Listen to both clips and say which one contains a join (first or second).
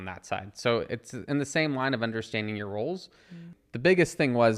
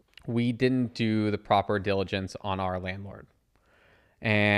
first